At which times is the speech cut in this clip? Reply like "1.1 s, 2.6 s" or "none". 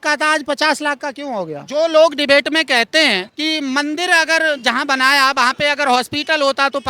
1.6 s, 3.3 s